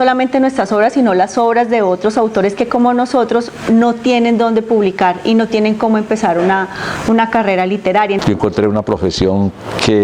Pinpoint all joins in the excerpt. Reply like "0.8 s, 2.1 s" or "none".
8.2 s